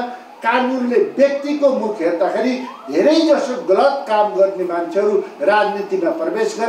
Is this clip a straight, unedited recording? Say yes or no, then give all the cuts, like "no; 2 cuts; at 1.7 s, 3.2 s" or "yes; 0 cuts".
yes; 0 cuts